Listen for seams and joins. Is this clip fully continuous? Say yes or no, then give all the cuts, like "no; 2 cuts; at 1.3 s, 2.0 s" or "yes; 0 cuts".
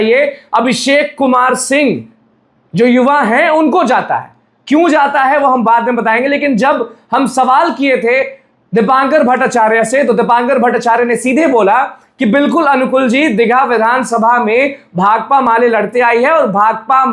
yes; 0 cuts